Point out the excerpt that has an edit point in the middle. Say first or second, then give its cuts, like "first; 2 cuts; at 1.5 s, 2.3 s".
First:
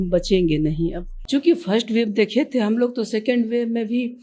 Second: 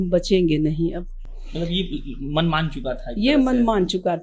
first; 1 cut; at 1.1 s